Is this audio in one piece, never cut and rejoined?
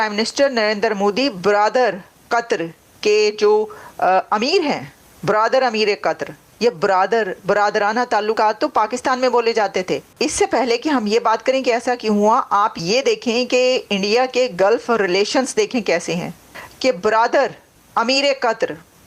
yes; 0 cuts

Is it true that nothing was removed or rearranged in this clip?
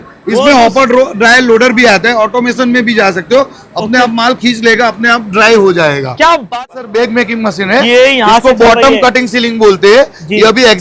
no; 1 cut; at 6.5 s

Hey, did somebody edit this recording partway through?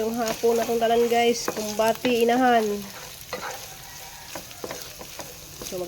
no; 0 cuts

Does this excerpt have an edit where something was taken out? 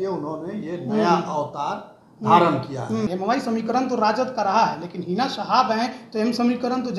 yes; 1 cut; at 3.1 s

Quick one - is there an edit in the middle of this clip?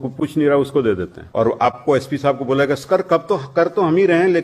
yes; 1 cut; at 1.2 s

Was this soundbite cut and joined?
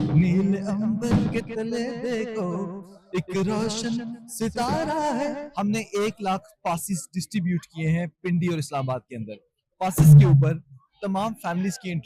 yes; 1 cut; at 5.5 s

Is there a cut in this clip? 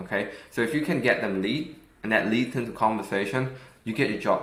no; 0 cuts

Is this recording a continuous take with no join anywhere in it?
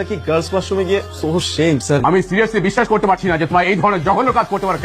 no; 1 cut; at 2.0 s

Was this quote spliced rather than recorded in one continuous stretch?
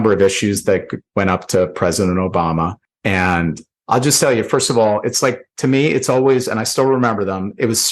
yes; 2 cuts; at 2.9 s, 3.7 s

